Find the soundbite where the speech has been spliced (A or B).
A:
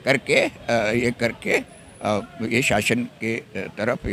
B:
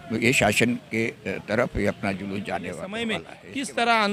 B